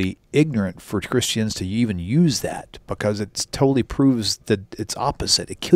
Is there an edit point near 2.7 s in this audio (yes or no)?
no